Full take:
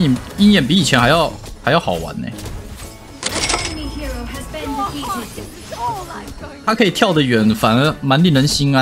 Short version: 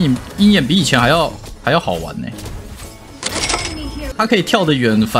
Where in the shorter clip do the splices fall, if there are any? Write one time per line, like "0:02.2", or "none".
0:04.1